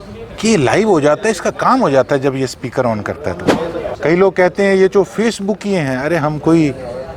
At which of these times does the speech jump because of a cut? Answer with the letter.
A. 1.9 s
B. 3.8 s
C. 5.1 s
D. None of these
B